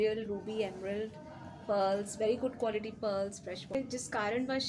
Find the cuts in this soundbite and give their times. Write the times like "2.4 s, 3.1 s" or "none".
3.7 s